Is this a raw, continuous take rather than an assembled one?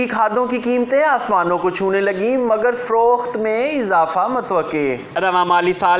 yes; 0 cuts

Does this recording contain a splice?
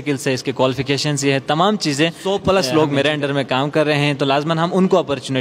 yes; 1 cut; at 2.2 s

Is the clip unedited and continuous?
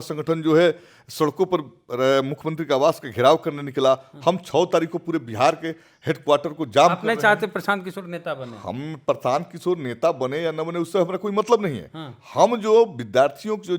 yes; 0 cuts

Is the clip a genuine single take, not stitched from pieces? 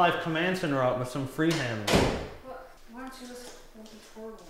no; 1 cut; at 2.8 s

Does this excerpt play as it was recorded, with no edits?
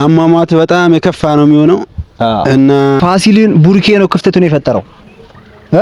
no; 1 cut; at 3.0 s

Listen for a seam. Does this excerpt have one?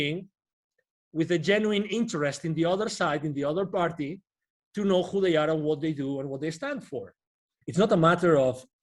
yes; 1 cut; at 7.5 s

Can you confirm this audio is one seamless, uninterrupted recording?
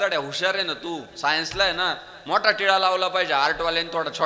yes; 0 cuts

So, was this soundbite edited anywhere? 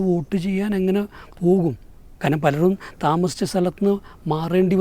no; 0 cuts

